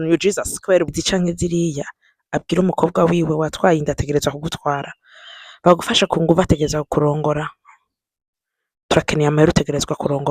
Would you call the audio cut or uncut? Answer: cut